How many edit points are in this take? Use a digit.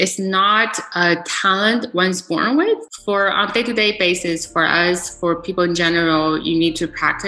1